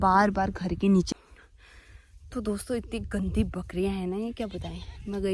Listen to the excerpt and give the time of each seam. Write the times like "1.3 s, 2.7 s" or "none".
1.1 s